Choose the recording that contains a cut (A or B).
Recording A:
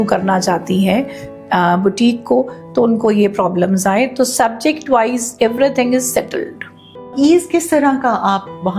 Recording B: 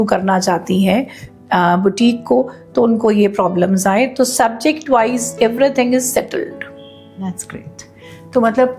A